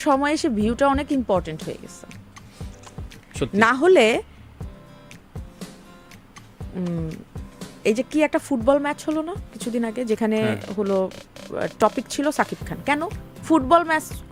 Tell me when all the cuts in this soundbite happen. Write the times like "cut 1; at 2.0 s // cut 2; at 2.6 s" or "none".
none